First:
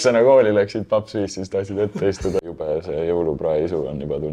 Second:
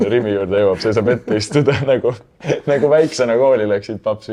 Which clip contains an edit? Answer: first; 1 cut; at 2.6 s

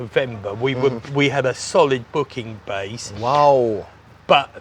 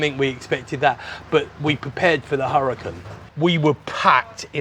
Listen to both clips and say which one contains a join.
second; 1 cut; at 3.1 s

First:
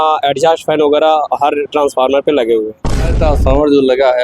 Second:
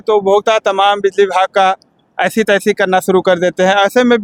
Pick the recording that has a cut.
first; 1 cut; at 3.2 s

